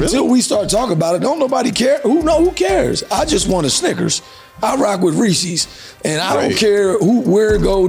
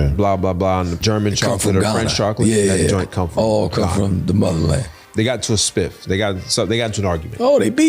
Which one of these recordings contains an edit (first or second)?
second